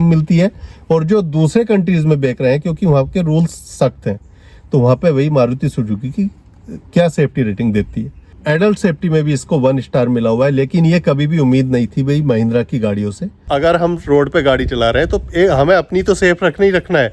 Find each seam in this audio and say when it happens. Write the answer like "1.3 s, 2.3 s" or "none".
8.3 s, 13.5 s

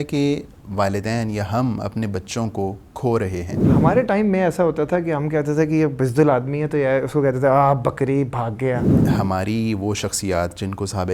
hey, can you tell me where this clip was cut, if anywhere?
3.8 s, 9.0 s

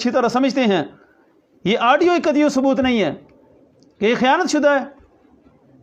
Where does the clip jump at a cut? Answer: none

